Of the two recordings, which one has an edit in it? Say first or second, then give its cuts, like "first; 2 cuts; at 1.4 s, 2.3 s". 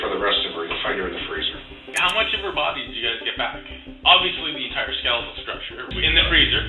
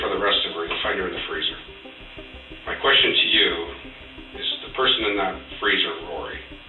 first; 2 cuts; at 1.9 s, 5.9 s